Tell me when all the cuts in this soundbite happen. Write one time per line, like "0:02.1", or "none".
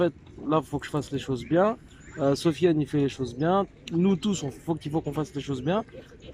none